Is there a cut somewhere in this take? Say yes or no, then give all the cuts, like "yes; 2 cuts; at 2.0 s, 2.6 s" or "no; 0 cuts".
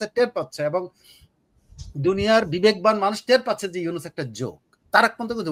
no; 0 cuts